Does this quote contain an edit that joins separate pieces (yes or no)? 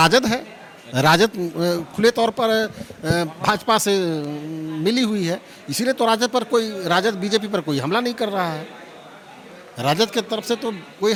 no